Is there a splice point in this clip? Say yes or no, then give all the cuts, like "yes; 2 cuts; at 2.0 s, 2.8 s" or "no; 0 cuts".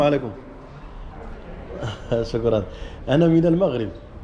no; 0 cuts